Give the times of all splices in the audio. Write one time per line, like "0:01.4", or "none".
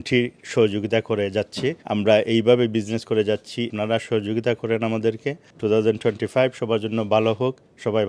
0:01.8
0:03.7
0:05.4

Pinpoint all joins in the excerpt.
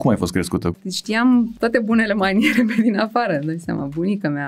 0:00.7
0:01.5

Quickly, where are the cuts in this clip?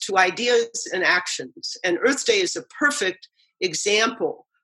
none

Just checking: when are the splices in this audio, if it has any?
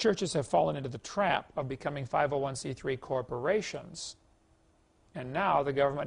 none

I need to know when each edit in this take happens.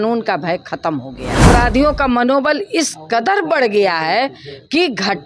0:01.4

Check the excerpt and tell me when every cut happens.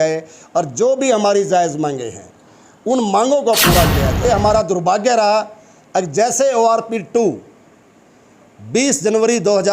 0:04.2

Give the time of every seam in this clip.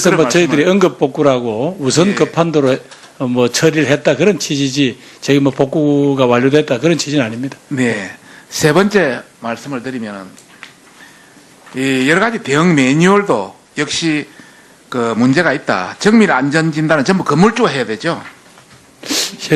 0:04.0

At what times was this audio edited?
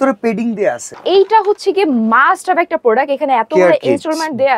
0:01.0

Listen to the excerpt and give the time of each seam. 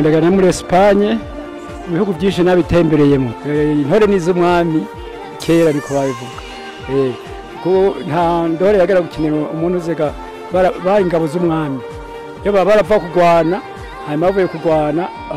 0:03.4

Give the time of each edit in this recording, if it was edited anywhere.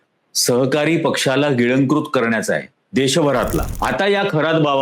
0:03.7

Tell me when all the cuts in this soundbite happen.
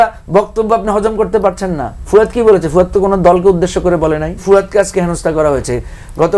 0:04.4

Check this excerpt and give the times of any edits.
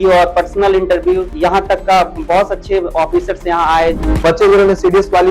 0:01.3
0:04.0

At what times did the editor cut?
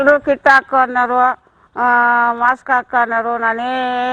none

